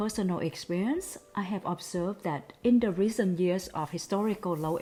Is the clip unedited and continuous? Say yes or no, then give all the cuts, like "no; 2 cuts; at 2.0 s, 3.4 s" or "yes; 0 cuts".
yes; 0 cuts